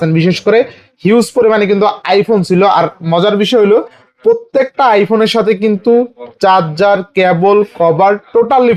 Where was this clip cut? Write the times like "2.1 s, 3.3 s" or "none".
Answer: none